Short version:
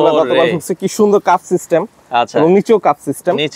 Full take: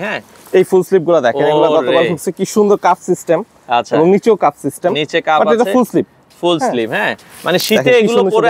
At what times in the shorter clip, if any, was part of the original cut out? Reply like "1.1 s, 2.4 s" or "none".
none